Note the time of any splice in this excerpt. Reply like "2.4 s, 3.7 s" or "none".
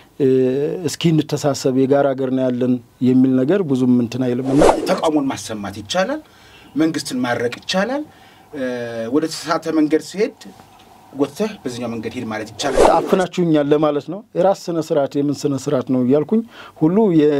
4.8 s, 12.8 s